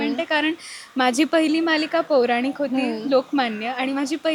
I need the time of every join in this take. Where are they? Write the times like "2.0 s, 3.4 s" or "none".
none